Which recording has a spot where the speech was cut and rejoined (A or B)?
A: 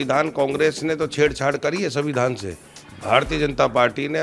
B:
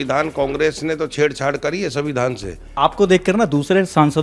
B